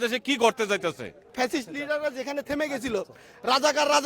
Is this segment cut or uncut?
cut